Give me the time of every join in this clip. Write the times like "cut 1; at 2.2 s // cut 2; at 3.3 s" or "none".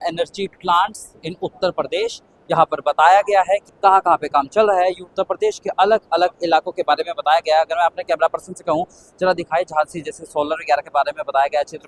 cut 1; at 3.7 s